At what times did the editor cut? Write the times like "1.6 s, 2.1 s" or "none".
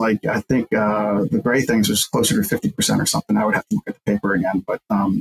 none